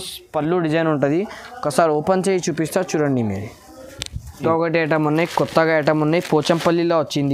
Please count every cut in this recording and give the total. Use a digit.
1